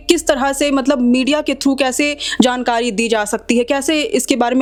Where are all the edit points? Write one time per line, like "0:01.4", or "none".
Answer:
none